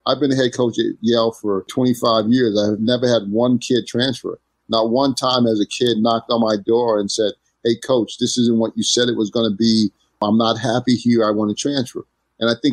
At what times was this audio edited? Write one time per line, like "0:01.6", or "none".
0:01.7
0:10.2